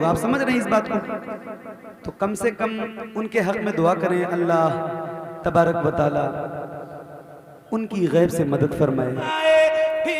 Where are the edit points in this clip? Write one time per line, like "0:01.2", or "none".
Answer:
0:09.3